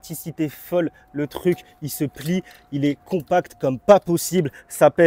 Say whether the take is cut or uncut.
uncut